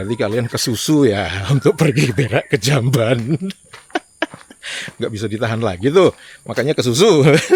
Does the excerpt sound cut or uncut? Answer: uncut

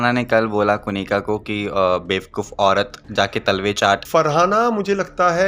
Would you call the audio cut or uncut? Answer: cut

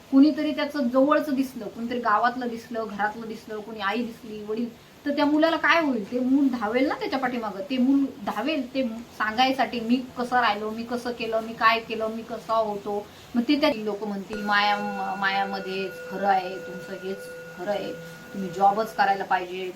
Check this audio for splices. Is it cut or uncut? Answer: cut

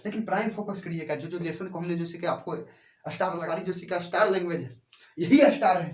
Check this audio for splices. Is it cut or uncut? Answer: cut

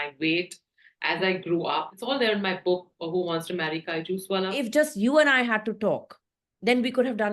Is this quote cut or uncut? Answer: cut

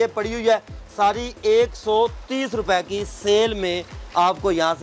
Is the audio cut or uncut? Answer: uncut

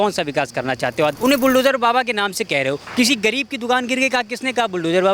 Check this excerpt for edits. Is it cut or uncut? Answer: cut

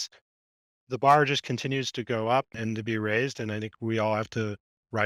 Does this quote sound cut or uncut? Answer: uncut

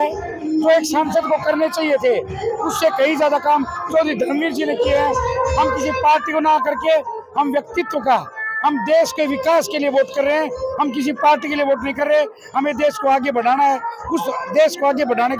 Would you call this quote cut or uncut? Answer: uncut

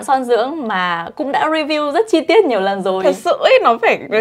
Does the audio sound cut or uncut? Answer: uncut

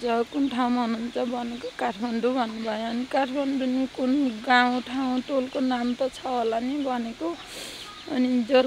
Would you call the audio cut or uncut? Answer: uncut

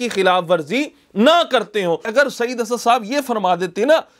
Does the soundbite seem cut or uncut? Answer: cut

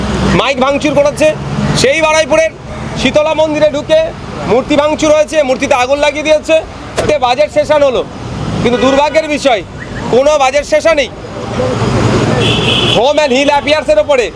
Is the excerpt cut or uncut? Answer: cut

